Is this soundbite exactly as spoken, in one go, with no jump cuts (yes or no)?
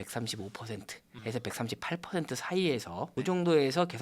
no